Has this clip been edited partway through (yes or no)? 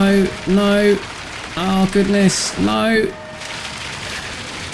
no